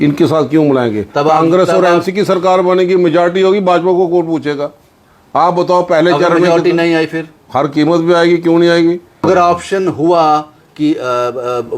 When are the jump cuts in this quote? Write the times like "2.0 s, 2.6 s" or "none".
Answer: 9.2 s